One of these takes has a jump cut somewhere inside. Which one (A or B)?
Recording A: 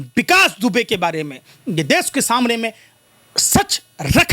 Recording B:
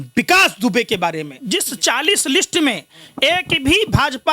B